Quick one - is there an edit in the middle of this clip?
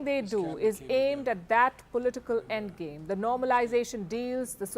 yes; 1 cut; at 3.4 s

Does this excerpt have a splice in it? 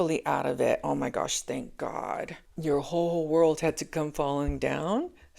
yes; 1 cut; at 2.4 s

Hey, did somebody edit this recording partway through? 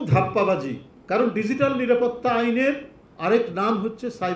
no; 0 cuts

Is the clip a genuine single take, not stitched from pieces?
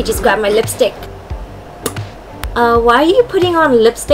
no; 1 cut; at 2.2 s

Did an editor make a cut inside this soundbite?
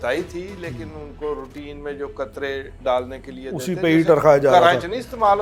no; 0 cuts

